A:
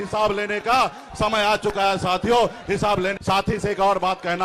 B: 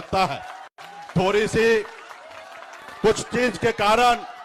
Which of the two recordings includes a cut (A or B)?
A